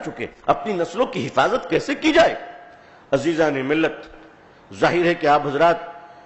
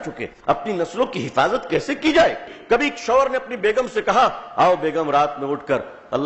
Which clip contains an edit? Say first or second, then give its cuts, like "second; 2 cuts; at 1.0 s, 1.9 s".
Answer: second; 1 cut; at 2.5 s